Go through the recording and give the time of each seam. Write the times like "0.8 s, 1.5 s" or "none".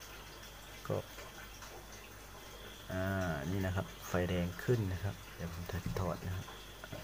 1.0 s